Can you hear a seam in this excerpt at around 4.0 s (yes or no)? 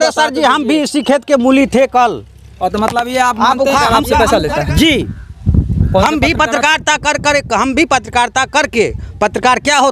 yes